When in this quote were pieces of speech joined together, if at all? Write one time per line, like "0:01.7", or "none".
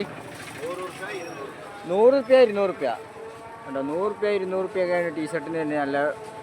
none